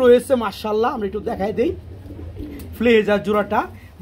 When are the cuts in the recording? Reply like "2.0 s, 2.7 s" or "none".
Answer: none